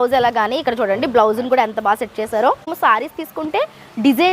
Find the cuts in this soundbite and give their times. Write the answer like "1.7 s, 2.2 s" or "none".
2.7 s